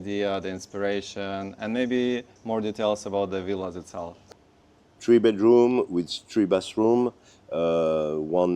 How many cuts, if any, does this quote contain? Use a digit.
1